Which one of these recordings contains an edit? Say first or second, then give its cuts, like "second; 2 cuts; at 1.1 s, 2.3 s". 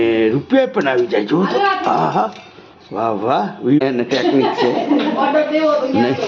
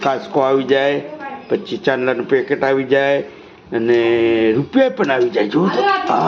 first; 1 cut; at 3.8 s